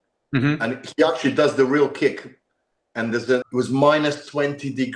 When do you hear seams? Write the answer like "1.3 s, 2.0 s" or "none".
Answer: 3.4 s